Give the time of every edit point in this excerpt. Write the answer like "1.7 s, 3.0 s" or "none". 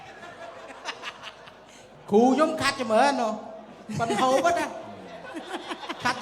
1.8 s